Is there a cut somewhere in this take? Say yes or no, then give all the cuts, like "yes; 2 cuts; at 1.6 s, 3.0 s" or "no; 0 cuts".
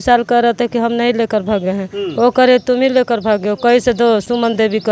no; 0 cuts